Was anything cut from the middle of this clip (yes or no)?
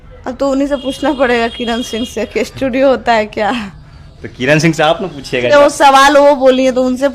no